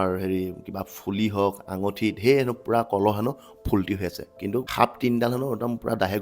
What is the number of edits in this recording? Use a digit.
1